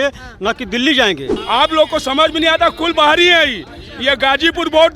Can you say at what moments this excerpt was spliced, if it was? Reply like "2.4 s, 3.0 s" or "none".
1.3 s